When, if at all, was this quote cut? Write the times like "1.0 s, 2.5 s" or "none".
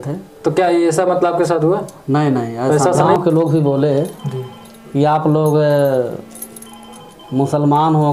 3.1 s

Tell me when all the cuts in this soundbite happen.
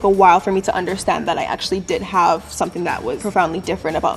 3.2 s

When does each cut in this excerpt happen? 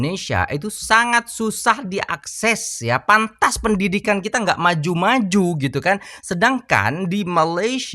none

